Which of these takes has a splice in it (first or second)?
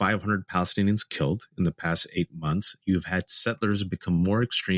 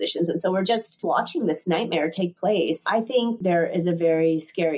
second